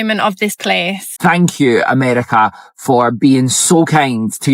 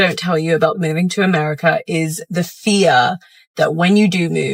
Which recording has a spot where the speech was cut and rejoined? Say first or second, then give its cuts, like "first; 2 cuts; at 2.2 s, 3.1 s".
first; 1 cut; at 1.1 s